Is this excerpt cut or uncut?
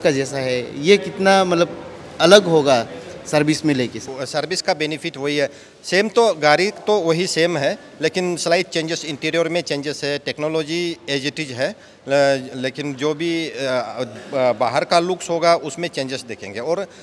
uncut